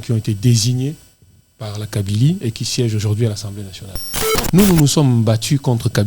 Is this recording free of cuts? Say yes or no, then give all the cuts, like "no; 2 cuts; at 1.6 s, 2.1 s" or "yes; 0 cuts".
no; 1 cut; at 4.3 s